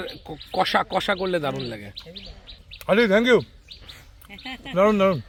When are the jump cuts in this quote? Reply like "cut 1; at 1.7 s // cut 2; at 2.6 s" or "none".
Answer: none